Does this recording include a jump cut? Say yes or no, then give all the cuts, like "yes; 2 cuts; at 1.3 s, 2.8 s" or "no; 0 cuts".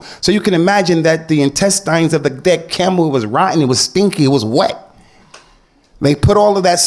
no; 0 cuts